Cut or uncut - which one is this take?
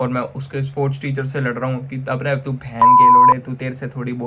cut